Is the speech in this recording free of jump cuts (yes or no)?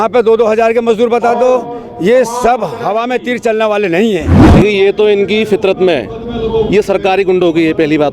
no